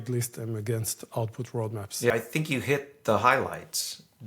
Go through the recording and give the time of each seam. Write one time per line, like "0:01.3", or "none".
0:02.1